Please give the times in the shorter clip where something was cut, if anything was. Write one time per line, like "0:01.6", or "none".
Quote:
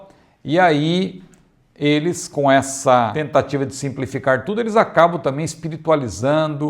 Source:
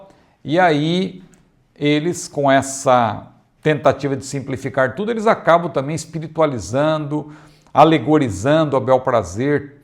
0:03.2